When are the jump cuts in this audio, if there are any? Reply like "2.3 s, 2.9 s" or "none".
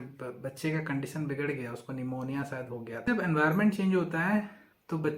3.1 s